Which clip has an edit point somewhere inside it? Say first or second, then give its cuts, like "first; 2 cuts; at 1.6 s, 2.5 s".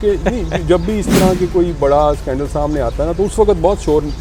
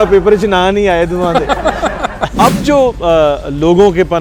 second; 1 cut; at 2.2 s